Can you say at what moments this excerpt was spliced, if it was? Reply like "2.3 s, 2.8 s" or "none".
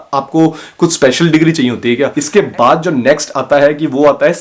2.2 s